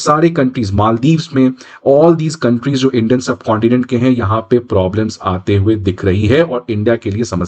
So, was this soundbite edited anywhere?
no; 0 cuts

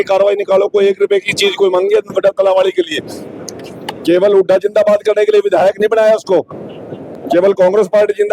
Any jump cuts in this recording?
no; 0 cuts

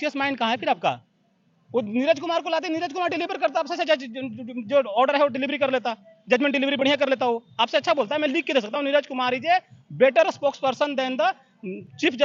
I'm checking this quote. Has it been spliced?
no; 0 cuts

